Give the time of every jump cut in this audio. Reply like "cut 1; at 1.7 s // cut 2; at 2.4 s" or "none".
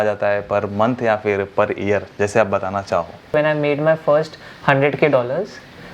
cut 1; at 3.3 s